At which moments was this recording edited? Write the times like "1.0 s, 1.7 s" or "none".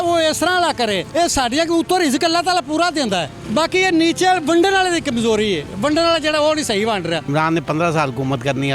1.0 s, 3.4 s, 7.3 s